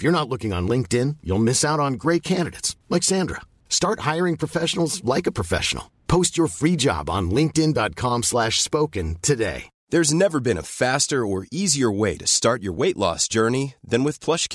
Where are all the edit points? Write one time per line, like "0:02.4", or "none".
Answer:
0:09.7